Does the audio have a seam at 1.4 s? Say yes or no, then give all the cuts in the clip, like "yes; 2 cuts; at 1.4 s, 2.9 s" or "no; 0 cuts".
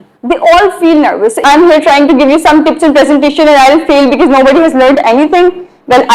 yes; 1 cut; at 1.4 s